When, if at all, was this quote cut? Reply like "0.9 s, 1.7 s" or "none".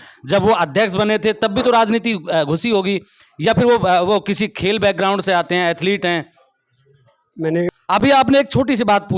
7.9 s